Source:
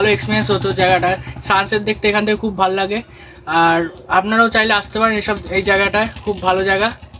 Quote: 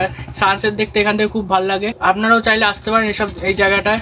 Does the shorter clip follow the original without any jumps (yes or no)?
no